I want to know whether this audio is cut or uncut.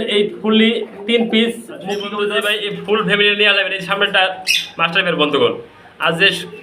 cut